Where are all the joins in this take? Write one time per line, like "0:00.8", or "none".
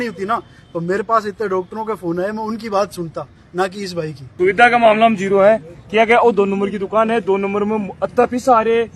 0:04.3